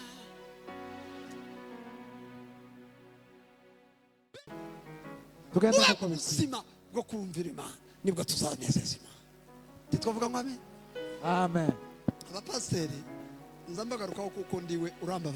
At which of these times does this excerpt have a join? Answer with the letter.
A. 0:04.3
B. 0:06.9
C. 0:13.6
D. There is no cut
A